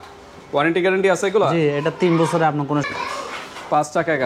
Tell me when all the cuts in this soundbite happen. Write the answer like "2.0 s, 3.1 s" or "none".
2.9 s